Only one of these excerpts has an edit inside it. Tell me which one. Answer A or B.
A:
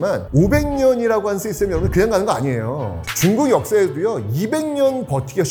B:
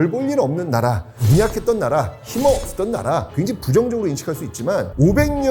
B